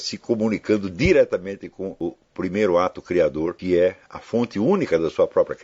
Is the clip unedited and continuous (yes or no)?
no